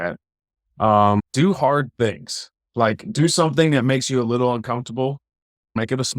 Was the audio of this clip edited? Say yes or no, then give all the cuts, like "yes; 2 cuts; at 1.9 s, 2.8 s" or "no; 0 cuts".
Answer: yes; 1 cut; at 1.3 s